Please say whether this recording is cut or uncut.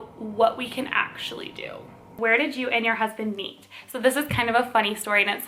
cut